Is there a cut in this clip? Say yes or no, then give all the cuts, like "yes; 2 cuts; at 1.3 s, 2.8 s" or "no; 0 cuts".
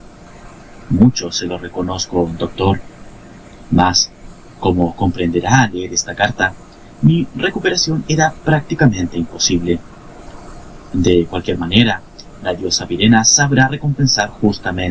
no; 0 cuts